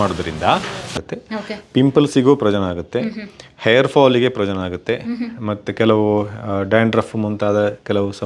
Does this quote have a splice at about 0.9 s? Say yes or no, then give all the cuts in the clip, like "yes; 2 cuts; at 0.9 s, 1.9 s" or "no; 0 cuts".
yes; 1 cut; at 0.9 s